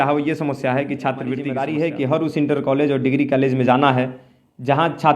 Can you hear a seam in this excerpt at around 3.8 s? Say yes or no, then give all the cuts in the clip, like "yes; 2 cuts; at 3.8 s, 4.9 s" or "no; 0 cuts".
no; 1 cut; at 1.5 s